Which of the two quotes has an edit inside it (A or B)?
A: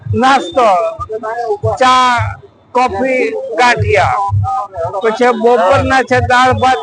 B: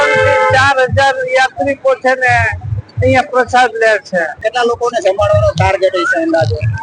B